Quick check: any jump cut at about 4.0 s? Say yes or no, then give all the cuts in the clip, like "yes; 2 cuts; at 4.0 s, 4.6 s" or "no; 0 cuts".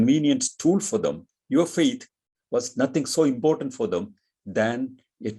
no; 1 cut; at 1.3 s